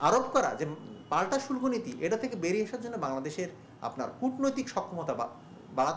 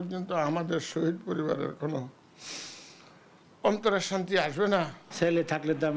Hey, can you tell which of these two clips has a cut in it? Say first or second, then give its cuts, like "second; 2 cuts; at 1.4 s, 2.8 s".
second; 1 cut; at 5.0 s